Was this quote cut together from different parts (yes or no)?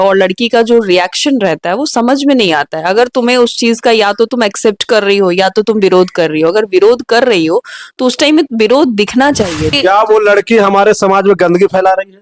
yes